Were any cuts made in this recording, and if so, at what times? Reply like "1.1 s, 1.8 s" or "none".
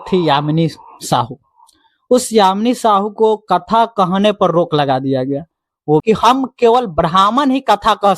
6.0 s